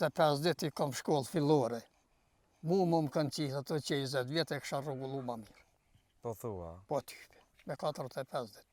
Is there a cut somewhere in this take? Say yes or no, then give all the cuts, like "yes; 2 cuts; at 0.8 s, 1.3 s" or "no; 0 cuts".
no; 0 cuts